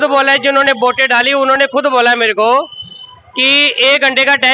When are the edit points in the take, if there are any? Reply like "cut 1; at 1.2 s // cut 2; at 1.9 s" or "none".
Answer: none